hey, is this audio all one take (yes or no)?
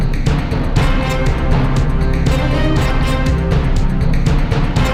yes